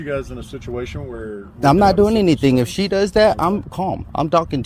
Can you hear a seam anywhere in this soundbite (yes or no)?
no